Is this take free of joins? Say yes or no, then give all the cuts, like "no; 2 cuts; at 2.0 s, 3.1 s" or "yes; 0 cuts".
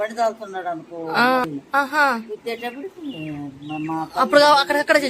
no; 1 cut; at 1.5 s